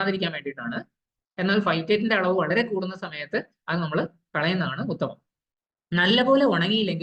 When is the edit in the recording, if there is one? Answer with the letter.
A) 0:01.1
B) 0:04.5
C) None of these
C